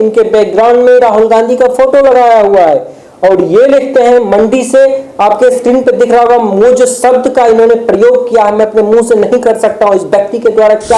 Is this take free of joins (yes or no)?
yes